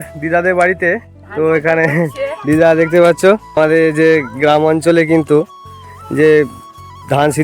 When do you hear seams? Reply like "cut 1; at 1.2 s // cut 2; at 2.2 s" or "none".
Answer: cut 1; at 3.6 s